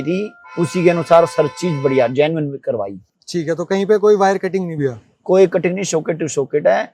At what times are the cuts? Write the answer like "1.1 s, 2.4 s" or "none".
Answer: none